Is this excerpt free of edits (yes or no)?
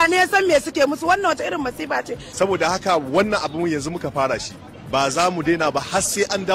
no